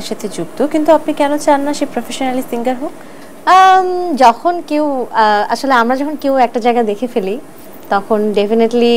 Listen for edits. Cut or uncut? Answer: uncut